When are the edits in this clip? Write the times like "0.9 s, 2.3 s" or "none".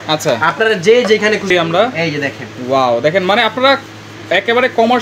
1.5 s